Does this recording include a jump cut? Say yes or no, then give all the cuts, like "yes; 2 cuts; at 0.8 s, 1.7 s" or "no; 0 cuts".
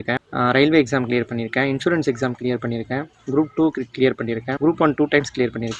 yes; 1 cut; at 4.5 s